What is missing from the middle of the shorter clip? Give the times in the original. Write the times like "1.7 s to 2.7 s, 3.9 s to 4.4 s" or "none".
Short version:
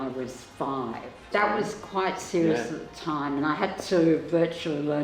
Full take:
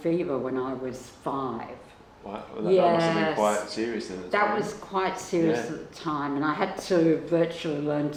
1.8 s to 4.1 s